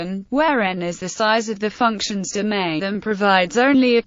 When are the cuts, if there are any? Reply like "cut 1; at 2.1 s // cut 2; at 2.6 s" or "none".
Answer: none